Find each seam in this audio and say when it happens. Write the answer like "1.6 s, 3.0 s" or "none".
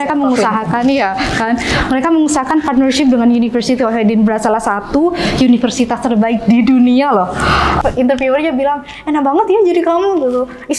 7.8 s

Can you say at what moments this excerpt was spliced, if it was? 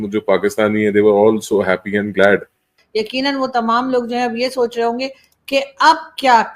2.8 s

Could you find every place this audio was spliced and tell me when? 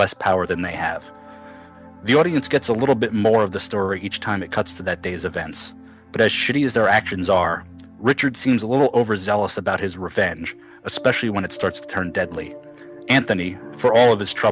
2.1 s

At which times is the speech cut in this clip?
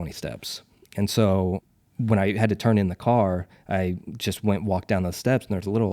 1.6 s

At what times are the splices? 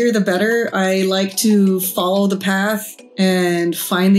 none

